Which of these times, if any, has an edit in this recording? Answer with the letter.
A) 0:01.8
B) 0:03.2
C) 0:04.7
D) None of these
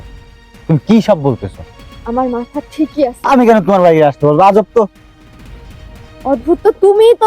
B